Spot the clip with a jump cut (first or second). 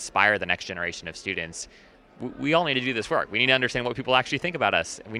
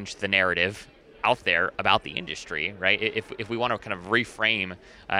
second